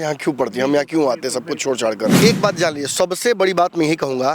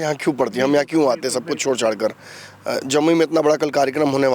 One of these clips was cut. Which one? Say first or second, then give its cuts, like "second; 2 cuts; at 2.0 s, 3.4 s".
first; 1 cut; at 2.2 s